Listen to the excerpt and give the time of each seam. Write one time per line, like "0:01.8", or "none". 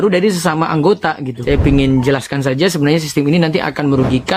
0:01.4